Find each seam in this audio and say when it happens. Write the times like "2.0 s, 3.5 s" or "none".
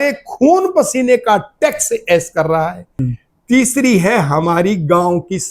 3.0 s